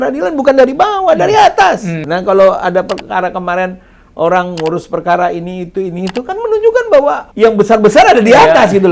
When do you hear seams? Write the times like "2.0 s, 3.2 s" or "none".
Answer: 2.0 s, 7.3 s